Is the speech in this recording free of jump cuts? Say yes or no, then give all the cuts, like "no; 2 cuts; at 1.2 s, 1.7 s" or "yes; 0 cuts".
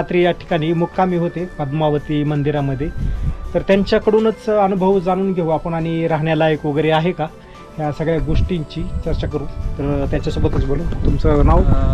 yes; 0 cuts